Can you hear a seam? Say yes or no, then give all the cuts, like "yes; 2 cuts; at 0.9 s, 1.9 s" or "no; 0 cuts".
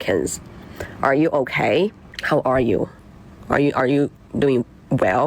yes; 1 cut; at 2.1 s